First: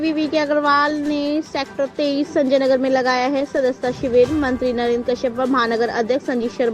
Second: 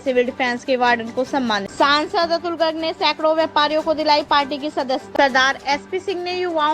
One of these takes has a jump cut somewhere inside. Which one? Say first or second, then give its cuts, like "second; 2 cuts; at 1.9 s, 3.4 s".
second; 2 cuts; at 1.7 s, 5.1 s